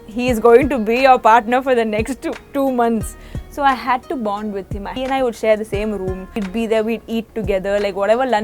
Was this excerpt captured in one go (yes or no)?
no